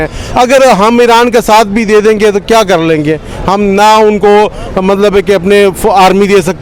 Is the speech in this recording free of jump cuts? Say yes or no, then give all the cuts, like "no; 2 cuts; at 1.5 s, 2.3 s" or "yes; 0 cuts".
yes; 0 cuts